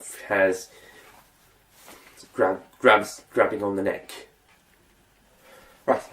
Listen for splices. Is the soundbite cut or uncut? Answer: cut